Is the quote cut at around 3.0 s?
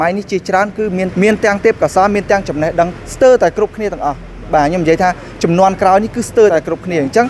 yes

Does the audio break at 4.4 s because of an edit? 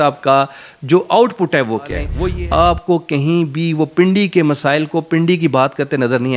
no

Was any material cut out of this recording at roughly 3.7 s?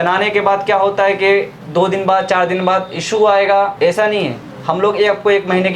yes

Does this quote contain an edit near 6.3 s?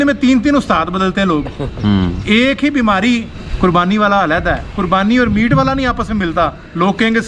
no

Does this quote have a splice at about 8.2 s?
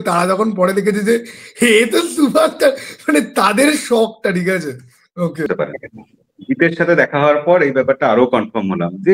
no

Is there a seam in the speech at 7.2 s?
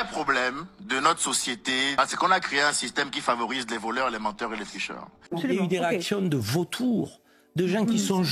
no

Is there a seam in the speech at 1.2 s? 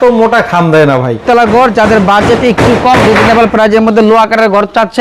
yes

